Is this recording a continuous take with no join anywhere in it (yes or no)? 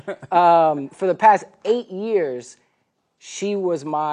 no